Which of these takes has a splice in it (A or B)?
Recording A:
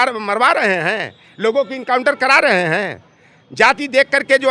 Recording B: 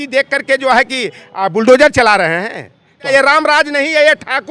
B